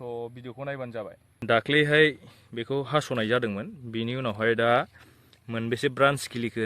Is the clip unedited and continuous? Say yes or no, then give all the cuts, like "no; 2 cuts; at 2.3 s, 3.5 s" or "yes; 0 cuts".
no; 1 cut; at 1.3 s